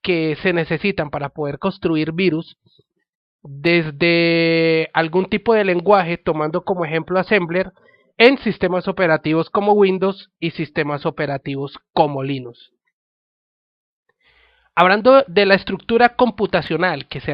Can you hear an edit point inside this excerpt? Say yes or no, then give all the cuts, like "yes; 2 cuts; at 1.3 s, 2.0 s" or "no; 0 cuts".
no; 0 cuts